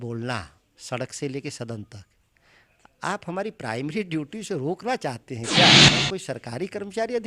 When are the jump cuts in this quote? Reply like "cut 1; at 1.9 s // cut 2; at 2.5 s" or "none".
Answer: cut 1; at 5.7 s // cut 2; at 6.1 s